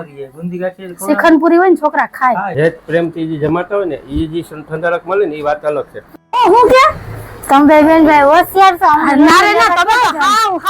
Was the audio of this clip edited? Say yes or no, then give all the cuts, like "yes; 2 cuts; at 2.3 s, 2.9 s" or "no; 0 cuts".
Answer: yes; 2 cuts; at 2.5 s, 6.0 s